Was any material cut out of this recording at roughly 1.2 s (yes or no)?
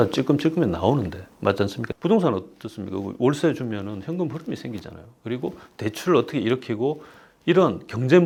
no